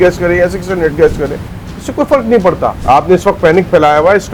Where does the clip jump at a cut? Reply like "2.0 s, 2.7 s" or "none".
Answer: 2.8 s